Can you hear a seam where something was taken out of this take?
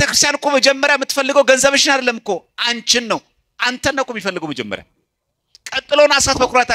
no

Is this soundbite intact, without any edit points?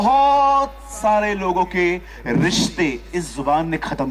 yes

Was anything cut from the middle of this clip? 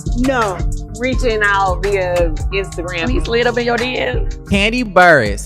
yes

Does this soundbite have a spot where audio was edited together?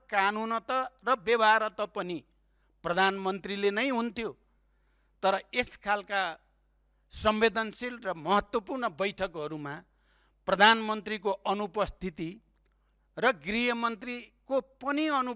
no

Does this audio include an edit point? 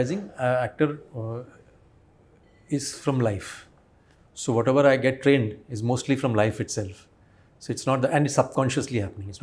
no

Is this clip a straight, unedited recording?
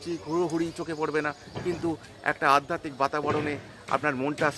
yes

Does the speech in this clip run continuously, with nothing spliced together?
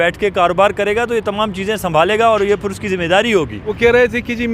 no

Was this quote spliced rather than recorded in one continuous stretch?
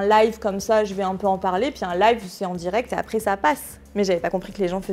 no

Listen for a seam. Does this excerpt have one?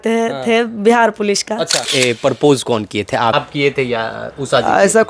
yes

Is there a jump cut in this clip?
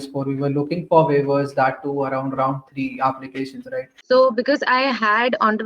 yes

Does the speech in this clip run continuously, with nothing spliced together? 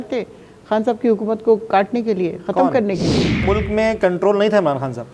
no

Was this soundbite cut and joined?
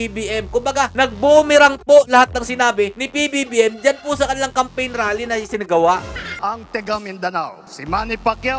yes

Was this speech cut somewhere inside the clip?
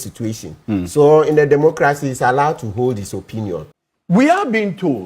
yes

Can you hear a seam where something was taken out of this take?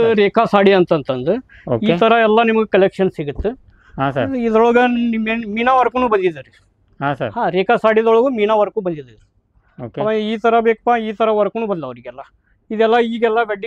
no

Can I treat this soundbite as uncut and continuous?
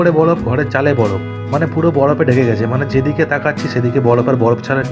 yes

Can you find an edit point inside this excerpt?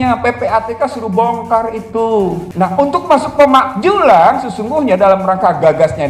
yes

